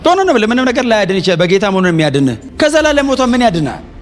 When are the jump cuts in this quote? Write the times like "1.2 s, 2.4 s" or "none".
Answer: 2.4 s